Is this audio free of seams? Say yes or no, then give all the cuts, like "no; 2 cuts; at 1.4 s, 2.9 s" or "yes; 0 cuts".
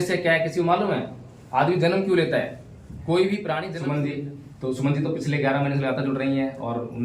no; 1 cut; at 3.7 s